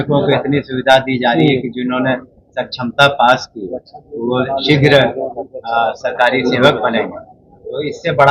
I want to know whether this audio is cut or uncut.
uncut